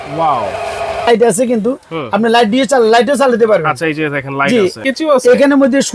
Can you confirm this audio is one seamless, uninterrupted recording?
no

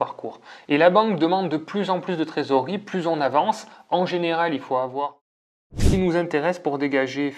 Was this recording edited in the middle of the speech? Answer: yes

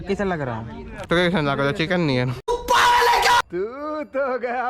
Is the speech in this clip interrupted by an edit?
yes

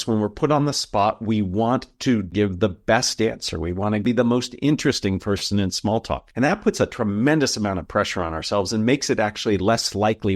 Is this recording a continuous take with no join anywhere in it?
no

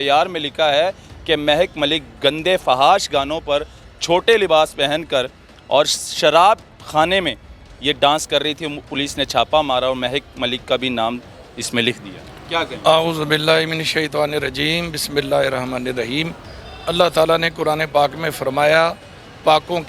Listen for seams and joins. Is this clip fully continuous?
yes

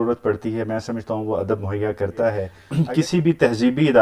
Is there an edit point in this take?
yes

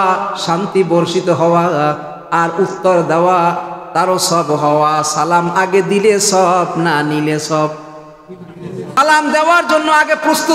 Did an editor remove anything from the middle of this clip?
yes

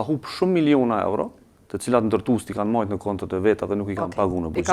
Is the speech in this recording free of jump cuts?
yes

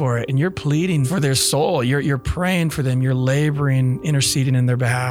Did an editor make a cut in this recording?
yes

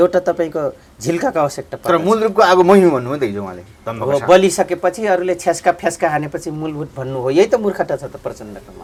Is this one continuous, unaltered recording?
yes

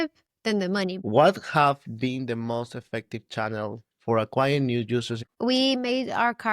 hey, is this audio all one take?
no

